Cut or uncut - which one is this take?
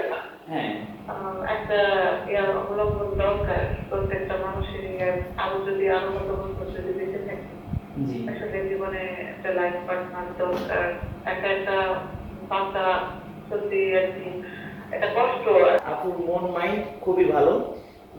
cut